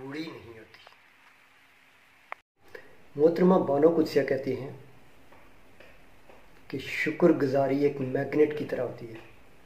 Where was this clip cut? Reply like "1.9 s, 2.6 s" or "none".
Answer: 2.6 s